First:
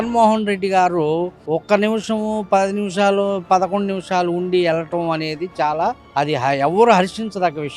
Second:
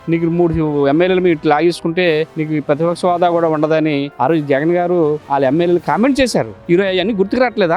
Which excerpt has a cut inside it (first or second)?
second